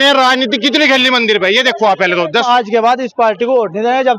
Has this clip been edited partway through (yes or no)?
yes